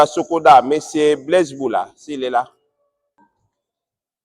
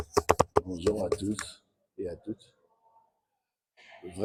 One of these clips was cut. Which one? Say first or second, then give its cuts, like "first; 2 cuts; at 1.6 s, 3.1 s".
first; 1 cut; at 3.2 s